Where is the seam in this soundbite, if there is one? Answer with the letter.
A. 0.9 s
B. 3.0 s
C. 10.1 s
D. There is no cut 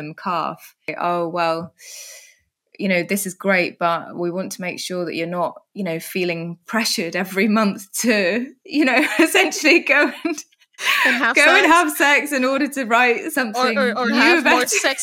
A